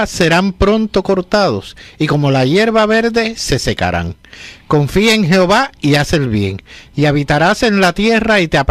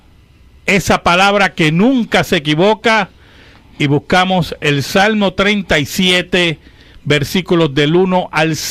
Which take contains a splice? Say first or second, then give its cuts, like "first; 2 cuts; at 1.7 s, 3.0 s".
second; 1 cut; at 7.2 s